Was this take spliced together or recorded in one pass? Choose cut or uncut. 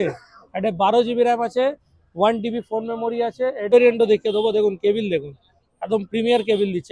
cut